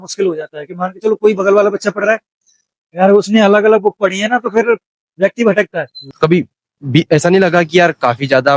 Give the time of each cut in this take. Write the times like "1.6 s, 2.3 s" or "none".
6.0 s